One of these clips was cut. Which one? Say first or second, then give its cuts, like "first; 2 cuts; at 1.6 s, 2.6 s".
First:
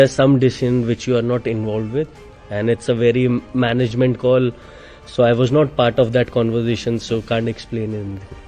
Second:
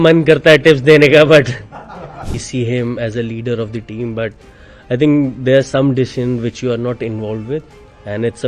second; 1 cut; at 2.4 s